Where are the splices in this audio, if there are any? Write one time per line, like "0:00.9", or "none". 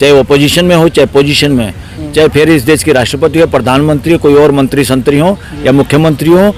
none